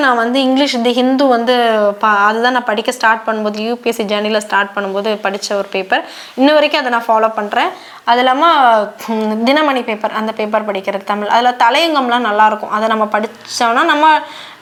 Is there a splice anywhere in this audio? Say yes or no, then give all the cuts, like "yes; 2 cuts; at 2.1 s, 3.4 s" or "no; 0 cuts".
no; 0 cuts